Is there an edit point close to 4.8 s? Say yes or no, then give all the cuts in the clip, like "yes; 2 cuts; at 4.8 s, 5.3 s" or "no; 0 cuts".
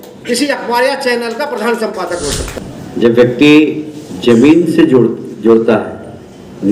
no; 1 cut; at 2.5 s